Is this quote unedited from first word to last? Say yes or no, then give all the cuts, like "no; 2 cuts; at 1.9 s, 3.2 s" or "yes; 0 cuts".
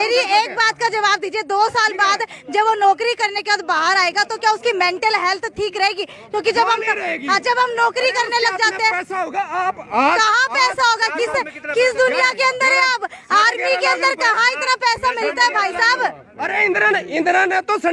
yes; 0 cuts